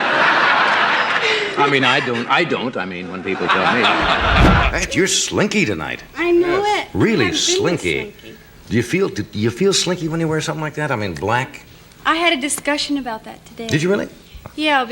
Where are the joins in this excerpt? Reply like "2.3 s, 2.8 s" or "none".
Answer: 4.7 s